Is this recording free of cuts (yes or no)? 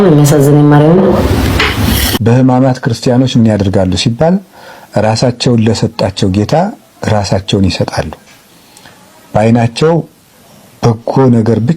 no